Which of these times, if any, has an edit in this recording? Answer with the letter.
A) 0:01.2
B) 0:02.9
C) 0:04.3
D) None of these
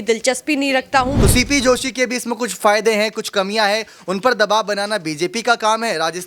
A